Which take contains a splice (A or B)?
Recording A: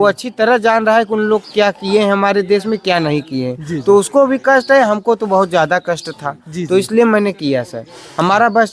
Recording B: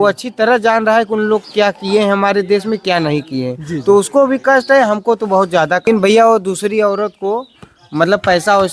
B